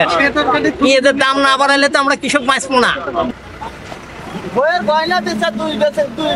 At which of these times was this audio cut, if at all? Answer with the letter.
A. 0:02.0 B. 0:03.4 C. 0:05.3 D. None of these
B